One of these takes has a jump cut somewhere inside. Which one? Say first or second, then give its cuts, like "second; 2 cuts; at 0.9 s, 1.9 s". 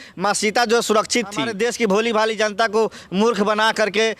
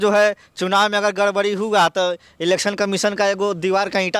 first; 1 cut; at 1.5 s